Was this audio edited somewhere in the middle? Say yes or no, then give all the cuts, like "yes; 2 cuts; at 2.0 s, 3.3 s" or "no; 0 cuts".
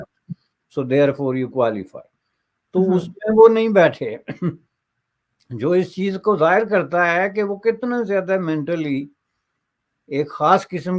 no; 0 cuts